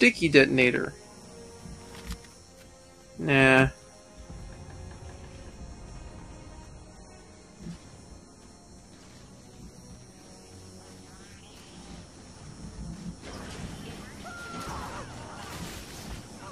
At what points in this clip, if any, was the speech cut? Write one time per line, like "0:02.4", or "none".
0:10.4